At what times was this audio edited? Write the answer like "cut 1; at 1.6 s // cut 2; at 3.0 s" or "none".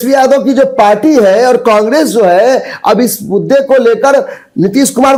none